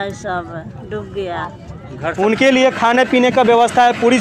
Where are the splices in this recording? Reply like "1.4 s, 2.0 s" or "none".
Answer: 2.0 s